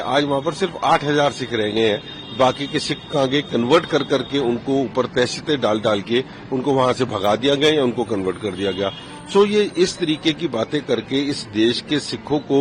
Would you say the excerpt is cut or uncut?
uncut